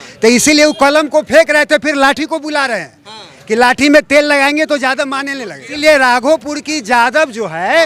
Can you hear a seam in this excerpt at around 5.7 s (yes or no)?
yes